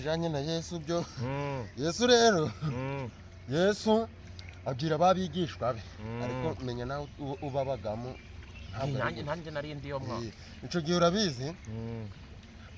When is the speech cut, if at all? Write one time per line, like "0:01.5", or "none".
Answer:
none